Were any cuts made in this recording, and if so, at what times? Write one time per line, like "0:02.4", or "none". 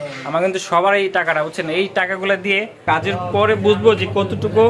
0:02.8